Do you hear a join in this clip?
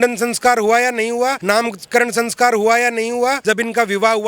yes; 2 cuts; at 1.4 s, 3.4 s

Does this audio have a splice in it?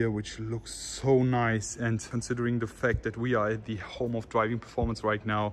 yes; 1 cut; at 2.1 s

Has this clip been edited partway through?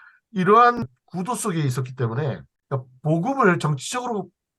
yes; 2 cuts; at 0.8 s, 2.5 s

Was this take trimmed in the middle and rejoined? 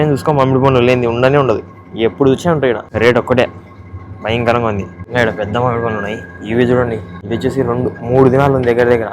yes; 3 cuts; at 2.9 s, 5.0 s, 7.1 s

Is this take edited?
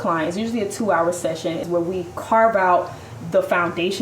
yes; 1 cut; at 1.6 s

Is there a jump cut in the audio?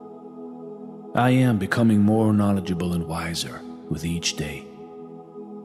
no; 0 cuts

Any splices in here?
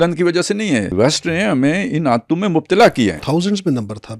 yes; 2 cuts; at 0.9 s, 3.2 s

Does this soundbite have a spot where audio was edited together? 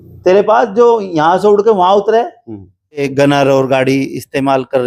yes; 1 cut; at 3.0 s

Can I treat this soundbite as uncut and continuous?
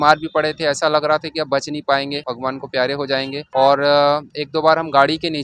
yes; 0 cuts

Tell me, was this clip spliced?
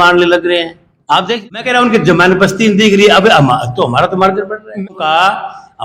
yes; 2 cuts; at 1.3 s, 4.8 s

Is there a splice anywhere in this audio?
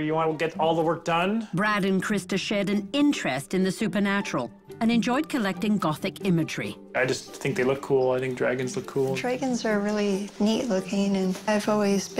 no; 0 cuts

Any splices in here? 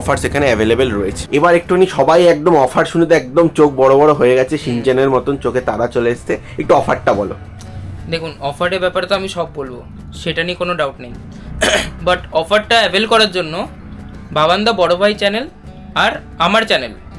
no; 0 cuts

